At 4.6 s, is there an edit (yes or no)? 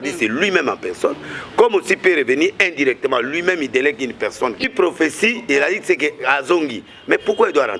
yes